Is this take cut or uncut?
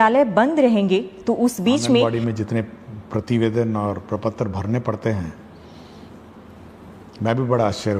cut